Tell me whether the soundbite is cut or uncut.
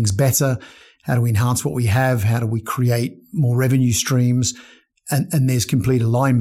uncut